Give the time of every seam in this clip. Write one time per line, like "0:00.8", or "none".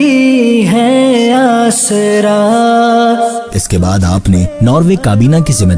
none